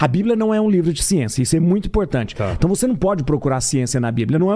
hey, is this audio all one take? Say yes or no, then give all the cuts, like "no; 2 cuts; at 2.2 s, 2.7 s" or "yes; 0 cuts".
yes; 0 cuts